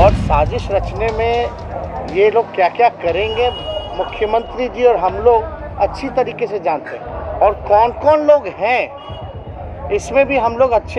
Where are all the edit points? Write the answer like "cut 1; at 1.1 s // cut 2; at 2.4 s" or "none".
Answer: none